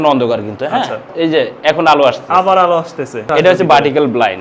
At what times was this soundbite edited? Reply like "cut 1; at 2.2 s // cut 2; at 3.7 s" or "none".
cut 1; at 1.1 s // cut 2; at 3.3 s

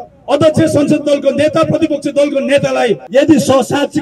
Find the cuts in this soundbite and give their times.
cut 1; at 3.0 s

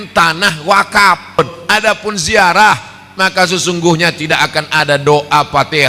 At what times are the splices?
cut 1; at 1.4 s

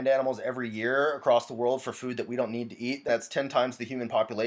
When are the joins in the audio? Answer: cut 1; at 3.0 s

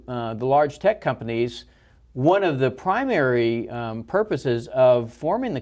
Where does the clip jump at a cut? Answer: cut 1; at 1.6 s

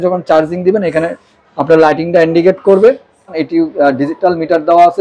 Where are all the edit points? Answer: cut 1; at 3.4 s

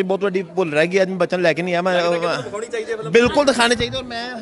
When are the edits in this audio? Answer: none

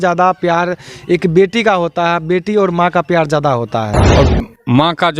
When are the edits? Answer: cut 1; at 4.1 s

